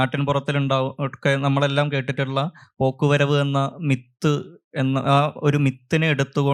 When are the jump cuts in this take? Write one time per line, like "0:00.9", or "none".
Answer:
none